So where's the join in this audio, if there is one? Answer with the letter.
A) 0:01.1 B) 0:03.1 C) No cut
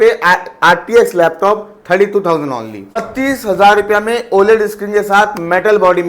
B